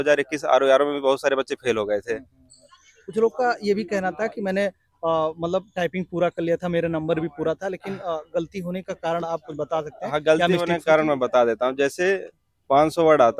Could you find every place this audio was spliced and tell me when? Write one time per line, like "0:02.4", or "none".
none

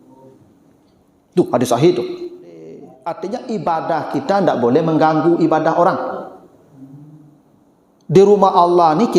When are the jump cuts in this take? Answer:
0:02.9

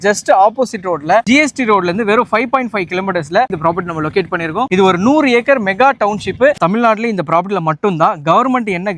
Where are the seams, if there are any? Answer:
0:01.2
0:03.5
0:06.6

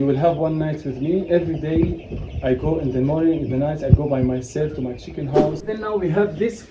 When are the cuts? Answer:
0:05.7

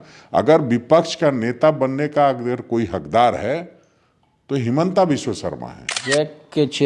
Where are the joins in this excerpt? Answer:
0:06.0

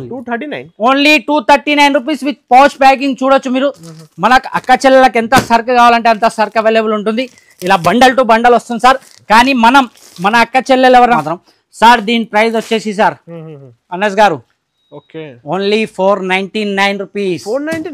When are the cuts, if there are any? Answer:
0:11.2

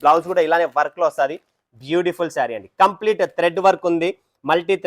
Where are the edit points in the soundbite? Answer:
none

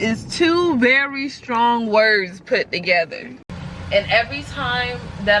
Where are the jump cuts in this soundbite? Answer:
0:03.5

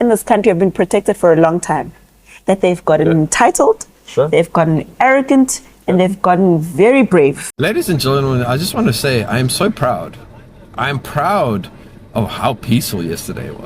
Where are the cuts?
0:07.5

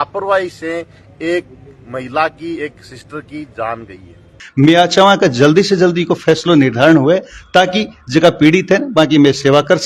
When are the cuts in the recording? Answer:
0:04.4

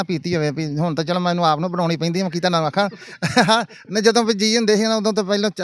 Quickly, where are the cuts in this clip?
none

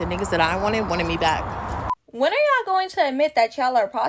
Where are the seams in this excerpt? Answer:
0:02.0

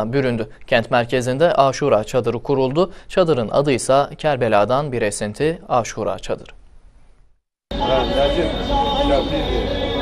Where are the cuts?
none

